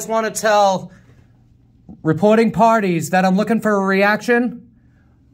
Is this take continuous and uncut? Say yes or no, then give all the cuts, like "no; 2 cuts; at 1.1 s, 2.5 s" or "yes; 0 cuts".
yes; 0 cuts